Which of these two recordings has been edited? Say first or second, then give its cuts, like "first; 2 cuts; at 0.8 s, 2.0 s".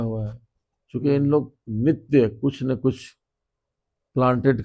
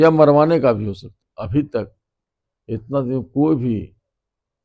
second; 1 cut; at 1.3 s